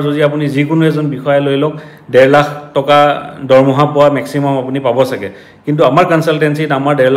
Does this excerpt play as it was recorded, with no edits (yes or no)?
yes